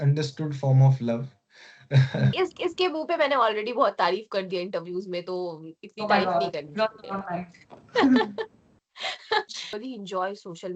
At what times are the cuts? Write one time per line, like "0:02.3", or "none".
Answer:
0:02.3
0:09.8

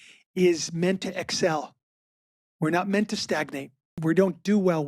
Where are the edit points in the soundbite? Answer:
0:03.8

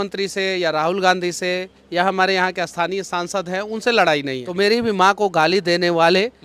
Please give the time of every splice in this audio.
0:04.4

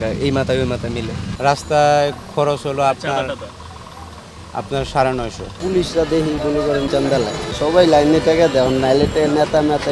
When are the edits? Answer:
0:05.5

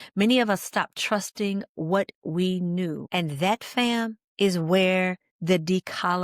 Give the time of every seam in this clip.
0:03.0
0:04.2
0:05.3

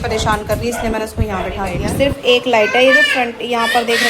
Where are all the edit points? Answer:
0:01.9

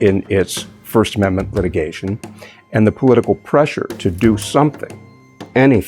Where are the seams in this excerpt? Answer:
none

